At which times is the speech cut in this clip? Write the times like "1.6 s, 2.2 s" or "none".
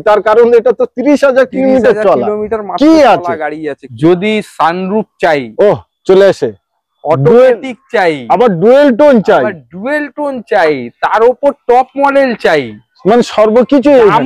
3.8 s

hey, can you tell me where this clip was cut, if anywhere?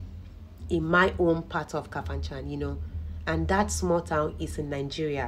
none

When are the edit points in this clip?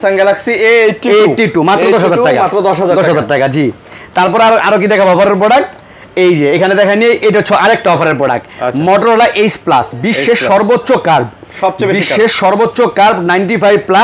none

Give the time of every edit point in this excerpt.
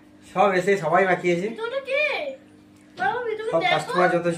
none

